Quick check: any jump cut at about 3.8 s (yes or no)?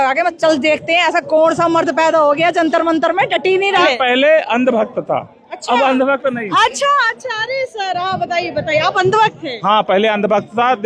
yes